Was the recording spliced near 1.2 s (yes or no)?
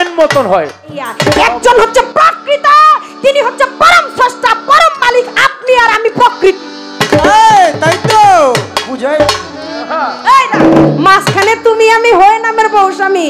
yes